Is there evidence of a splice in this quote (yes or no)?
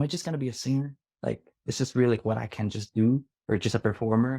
yes